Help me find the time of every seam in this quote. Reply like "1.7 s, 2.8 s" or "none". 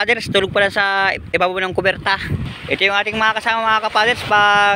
2.5 s